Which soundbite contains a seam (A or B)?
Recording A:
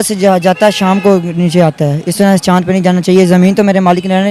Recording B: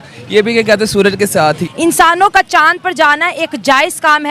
B